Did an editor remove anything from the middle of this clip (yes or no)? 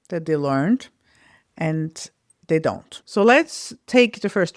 yes